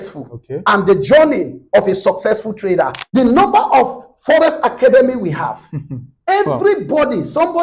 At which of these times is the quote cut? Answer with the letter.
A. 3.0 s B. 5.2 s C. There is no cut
A